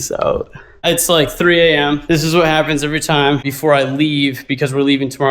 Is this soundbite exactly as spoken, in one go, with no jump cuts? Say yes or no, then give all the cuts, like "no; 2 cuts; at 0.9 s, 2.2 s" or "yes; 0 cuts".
no; 2 cuts; at 0.8 s, 3.5 s